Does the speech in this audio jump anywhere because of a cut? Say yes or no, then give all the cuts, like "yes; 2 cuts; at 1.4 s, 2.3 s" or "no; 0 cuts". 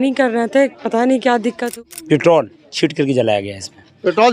yes; 1 cut; at 1.7 s